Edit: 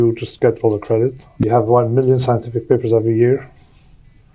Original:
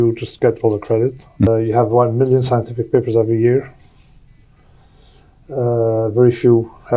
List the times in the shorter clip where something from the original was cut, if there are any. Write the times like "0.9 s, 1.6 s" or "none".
1.4 s